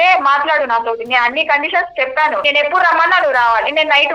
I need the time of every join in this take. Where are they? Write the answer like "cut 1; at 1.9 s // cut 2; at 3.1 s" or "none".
cut 1; at 2.4 s